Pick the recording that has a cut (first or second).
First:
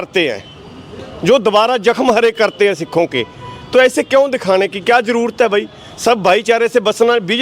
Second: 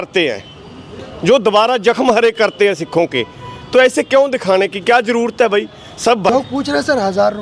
second